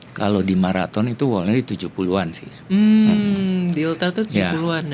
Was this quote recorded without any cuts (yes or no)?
yes